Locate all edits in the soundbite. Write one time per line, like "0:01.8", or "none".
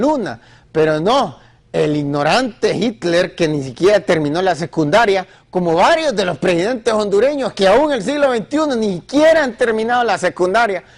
0:08.4